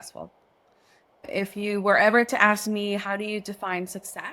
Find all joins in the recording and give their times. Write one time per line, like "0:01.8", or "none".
0:01.3